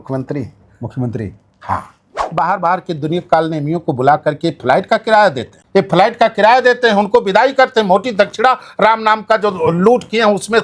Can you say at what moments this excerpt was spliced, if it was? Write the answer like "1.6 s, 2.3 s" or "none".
2.2 s, 5.5 s